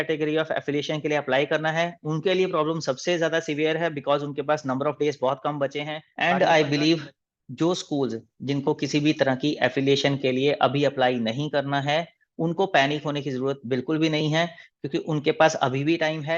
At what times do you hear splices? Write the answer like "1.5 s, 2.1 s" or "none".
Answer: 6.0 s